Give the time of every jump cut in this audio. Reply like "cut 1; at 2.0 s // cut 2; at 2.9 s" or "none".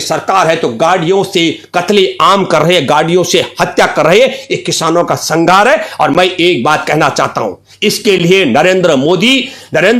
none